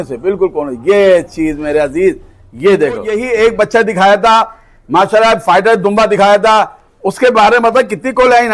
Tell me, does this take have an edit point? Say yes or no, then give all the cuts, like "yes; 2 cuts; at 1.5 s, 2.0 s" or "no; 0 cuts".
yes; 1 cut; at 3.1 s